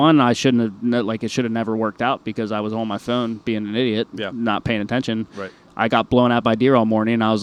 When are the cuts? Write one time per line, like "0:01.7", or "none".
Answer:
none